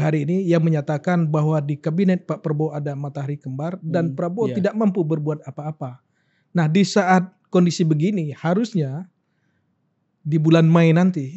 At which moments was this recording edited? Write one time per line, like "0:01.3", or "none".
none